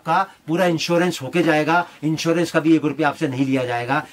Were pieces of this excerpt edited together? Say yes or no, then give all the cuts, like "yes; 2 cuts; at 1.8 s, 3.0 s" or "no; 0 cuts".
no; 0 cuts